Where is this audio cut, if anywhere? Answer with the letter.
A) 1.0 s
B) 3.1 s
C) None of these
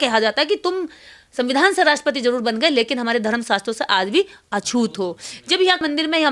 C